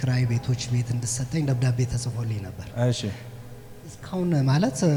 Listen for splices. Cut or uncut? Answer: uncut